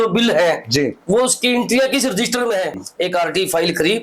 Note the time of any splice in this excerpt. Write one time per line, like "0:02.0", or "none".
0:02.8